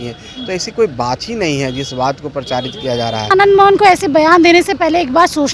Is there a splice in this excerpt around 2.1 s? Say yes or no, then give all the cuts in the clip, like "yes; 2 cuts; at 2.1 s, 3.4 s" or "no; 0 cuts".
no; 1 cut; at 3.3 s